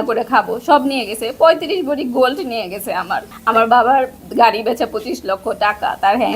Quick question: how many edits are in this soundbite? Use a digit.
1